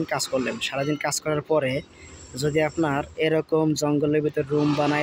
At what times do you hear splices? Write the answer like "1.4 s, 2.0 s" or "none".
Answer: none